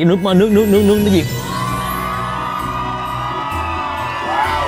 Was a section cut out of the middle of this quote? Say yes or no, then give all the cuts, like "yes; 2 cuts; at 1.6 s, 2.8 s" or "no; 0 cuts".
no; 0 cuts